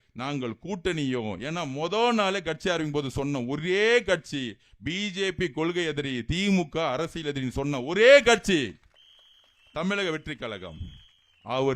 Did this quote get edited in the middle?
no; 0 cuts

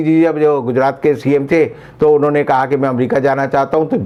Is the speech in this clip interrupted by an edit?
no; 0 cuts

